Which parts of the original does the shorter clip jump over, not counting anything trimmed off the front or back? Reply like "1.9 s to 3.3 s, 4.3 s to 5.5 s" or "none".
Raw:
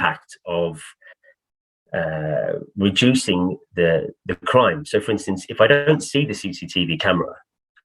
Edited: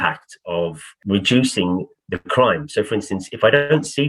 0.9 s to 2.7 s, 3.7 s to 4.1 s